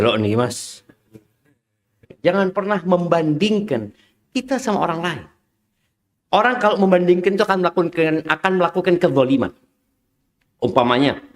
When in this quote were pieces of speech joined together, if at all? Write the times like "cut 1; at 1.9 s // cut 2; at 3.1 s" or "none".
cut 1; at 2.1 s